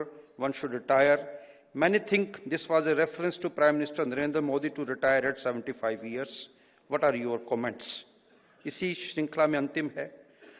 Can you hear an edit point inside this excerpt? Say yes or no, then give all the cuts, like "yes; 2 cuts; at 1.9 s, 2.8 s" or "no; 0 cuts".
no; 0 cuts